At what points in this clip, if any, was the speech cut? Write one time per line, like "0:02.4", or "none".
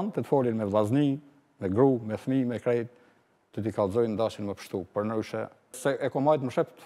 0:05.8